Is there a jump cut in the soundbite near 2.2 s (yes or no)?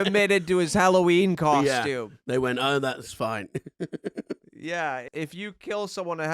no